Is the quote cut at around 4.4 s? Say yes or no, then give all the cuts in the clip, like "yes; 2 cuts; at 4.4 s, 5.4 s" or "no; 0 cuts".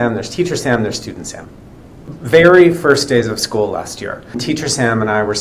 yes; 2 cuts; at 2.1 s, 4.4 s